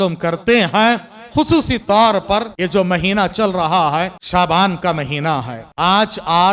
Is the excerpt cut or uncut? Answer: cut